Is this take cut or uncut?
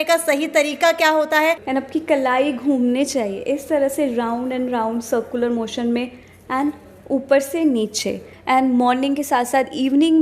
cut